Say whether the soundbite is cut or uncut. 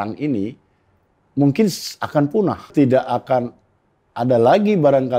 cut